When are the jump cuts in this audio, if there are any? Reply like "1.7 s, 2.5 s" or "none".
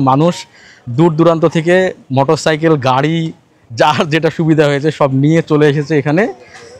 none